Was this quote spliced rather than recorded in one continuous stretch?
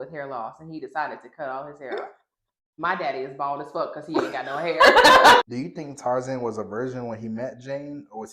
yes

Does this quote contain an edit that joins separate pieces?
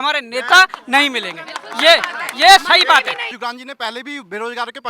yes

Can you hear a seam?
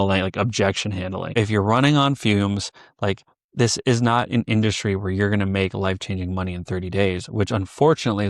yes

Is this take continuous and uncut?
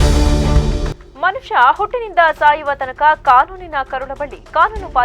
no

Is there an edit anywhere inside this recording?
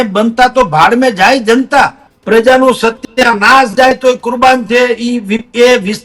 yes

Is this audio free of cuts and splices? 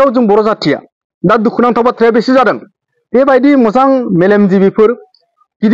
no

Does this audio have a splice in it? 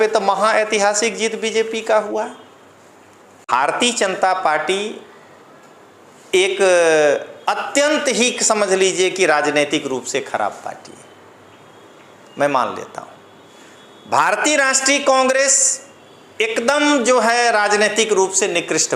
yes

